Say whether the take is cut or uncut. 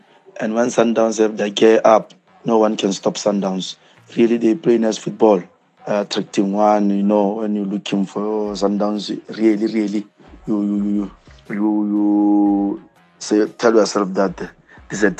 uncut